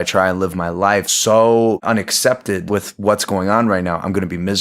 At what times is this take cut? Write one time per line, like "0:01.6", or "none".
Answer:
0:01.1
0:01.8
0:02.6